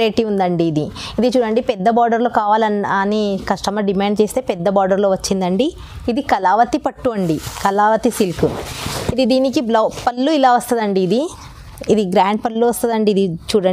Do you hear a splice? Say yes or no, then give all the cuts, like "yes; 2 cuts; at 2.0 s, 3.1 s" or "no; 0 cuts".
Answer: no; 0 cuts